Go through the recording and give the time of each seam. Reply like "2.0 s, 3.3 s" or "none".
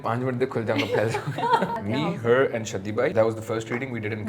1.8 s, 3.1 s